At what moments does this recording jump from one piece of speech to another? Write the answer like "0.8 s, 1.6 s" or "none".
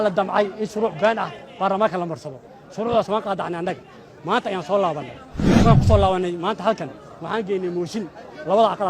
5.4 s

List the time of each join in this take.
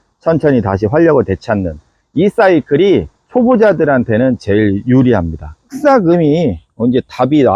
5.8 s

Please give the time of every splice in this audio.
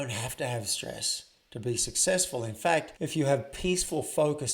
2.9 s

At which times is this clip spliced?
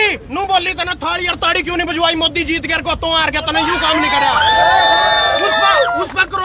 none

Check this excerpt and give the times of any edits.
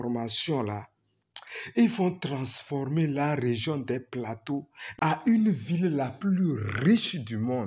5.2 s

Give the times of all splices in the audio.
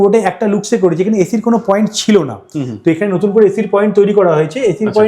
none

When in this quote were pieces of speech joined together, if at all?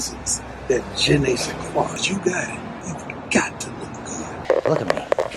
2.0 s, 2.8 s, 4.4 s

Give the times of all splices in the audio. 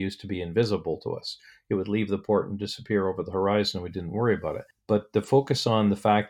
4.7 s

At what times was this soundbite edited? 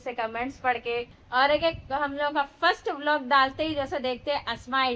1.2 s

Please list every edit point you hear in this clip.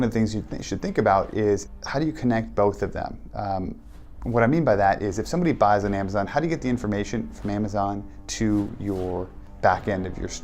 1.7 s, 9.4 s

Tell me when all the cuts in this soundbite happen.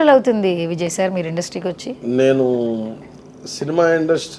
none

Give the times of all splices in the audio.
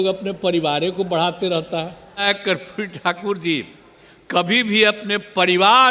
2.2 s

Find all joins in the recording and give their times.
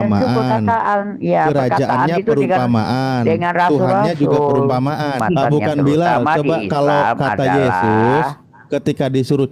5.2 s

